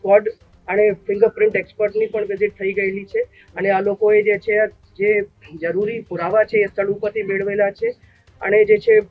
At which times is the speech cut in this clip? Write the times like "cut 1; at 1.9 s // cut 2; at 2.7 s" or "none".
none